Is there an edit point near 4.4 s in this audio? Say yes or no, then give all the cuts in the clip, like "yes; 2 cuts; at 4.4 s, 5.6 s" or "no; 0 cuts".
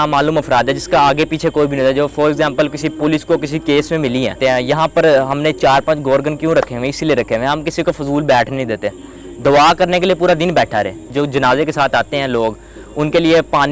yes; 2 cuts; at 4.4 s, 11.1 s